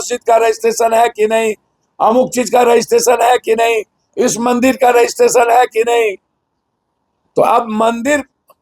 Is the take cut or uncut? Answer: uncut